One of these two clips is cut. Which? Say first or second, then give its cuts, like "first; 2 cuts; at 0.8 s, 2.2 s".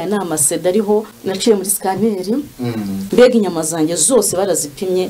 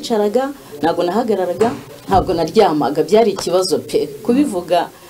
first; 2 cuts; at 1.4 s, 3.0 s